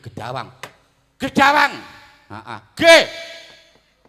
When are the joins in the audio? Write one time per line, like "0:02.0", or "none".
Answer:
none

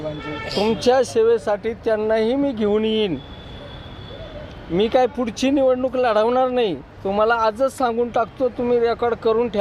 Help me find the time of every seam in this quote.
none

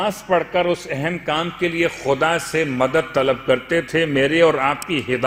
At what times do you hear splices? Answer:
none

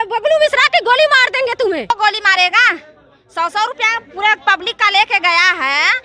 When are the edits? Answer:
0:01.9

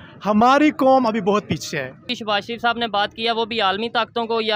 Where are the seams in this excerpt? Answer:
0:02.1

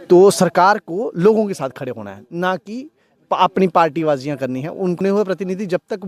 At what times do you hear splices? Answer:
0:05.0

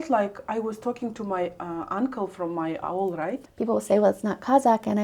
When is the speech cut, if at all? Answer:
0:03.4

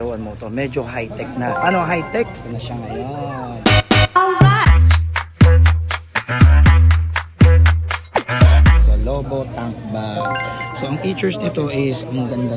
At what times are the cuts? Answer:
none

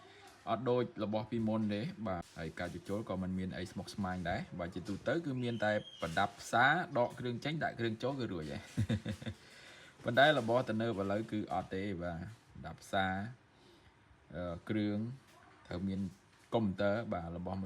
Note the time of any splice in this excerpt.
0:02.4

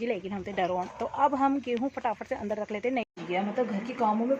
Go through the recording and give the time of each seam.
0:03.2

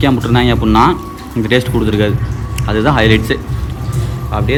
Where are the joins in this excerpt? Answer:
none

